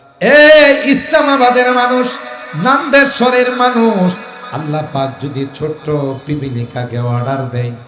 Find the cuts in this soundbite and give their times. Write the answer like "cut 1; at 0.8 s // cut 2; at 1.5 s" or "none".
none